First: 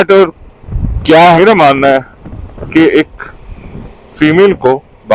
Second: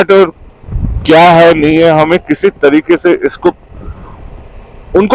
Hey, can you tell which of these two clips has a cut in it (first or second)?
first